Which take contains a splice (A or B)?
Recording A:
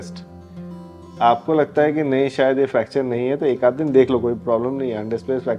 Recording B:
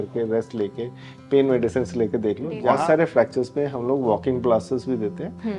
B